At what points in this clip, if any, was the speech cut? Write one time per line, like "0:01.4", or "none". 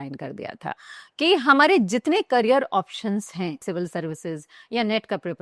0:00.9
0:03.6